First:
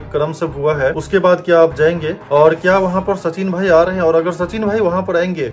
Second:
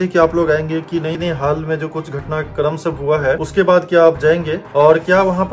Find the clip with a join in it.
second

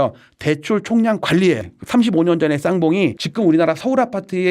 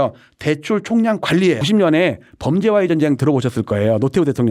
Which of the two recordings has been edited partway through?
first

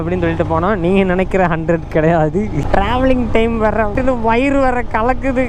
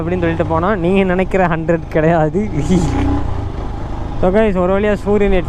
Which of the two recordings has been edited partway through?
first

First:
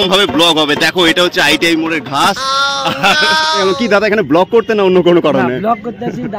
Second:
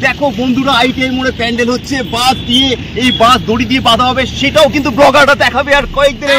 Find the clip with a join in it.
first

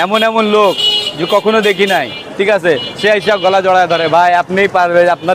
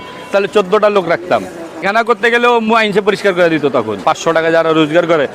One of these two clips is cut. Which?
second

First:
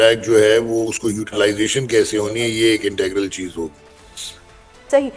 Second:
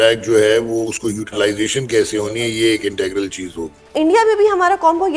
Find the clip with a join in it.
second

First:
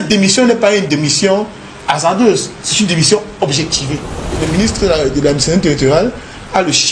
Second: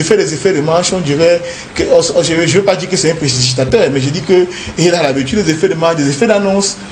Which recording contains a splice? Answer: first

